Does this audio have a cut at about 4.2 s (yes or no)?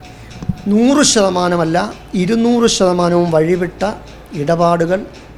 no